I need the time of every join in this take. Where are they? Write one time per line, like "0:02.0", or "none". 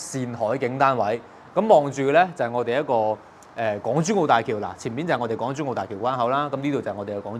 none